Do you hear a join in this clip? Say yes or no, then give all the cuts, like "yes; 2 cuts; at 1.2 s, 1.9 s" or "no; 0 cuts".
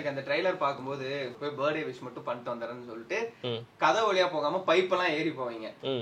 yes; 1 cut; at 1.3 s